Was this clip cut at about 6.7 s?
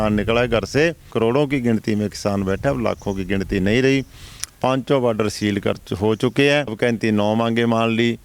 yes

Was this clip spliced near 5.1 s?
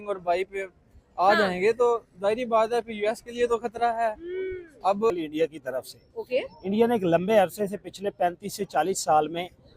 yes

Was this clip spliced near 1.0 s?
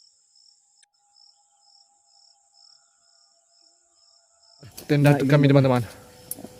no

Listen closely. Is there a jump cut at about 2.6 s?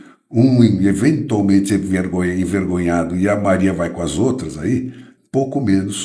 no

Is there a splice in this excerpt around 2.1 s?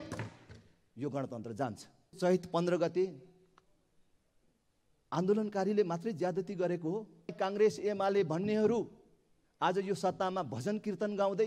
yes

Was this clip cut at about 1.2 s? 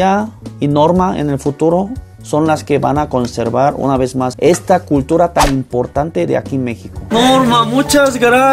no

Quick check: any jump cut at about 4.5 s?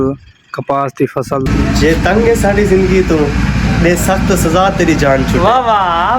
no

